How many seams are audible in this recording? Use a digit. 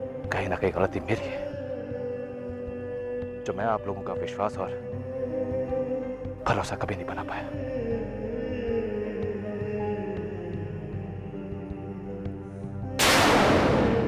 0